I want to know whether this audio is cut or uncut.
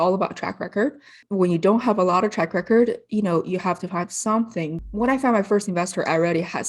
cut